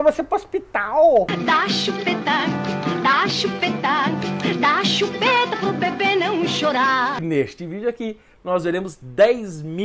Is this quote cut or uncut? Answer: cut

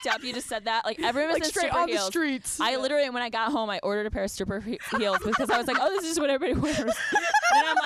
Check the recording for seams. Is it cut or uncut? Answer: uncut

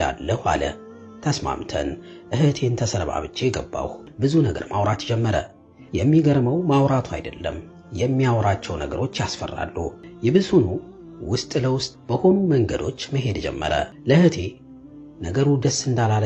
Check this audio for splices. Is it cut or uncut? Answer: cut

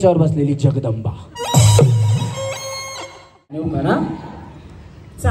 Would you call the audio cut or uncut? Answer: cut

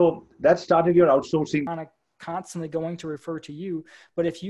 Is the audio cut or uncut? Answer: cut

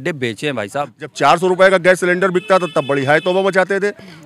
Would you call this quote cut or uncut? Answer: cut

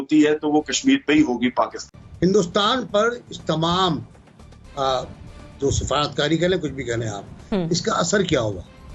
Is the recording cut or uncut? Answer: cut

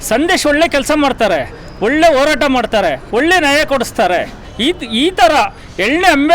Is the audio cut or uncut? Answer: cut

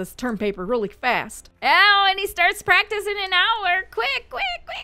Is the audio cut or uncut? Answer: uncut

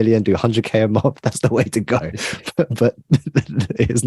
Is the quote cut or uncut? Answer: uncut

